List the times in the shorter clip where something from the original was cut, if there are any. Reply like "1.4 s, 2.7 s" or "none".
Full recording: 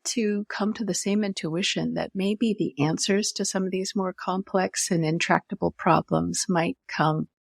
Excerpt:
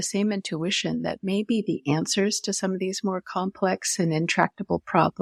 none